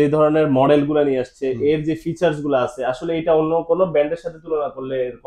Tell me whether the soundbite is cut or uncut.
uncut